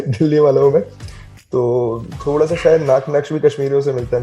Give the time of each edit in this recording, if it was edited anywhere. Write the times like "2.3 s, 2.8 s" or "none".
none